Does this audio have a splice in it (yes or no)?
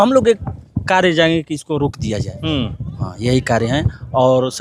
no